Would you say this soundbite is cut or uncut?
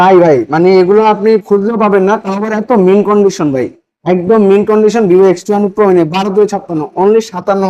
uncut